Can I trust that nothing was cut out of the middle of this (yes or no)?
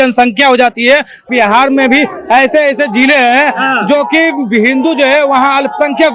no